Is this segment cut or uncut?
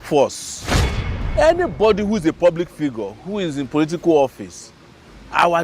cut